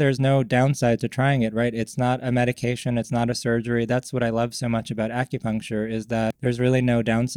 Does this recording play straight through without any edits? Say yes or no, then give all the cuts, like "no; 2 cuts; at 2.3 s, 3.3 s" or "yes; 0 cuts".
no; 1 cut; at 6.4 s